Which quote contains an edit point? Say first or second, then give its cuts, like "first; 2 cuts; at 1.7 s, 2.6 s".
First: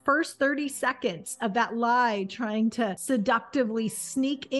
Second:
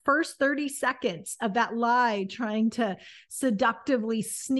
first; 1 cut; at 3.0 s